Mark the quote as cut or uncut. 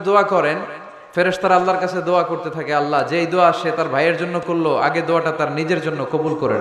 uncut